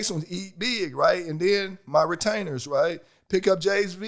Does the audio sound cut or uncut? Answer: uncut